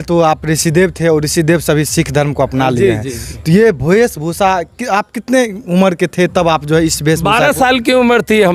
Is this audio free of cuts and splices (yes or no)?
yes